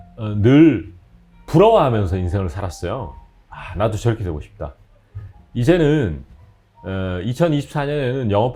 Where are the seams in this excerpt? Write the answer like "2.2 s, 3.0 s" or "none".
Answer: none